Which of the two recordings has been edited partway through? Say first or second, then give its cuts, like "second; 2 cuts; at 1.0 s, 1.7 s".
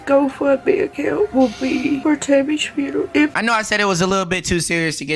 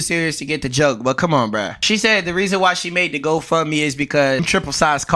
first; 1 cut; at 3.3 s